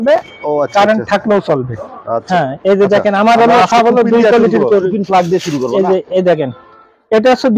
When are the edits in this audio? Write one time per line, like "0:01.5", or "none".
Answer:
0:02.2